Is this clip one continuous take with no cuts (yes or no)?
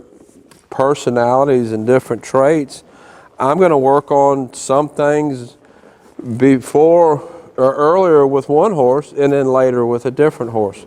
yes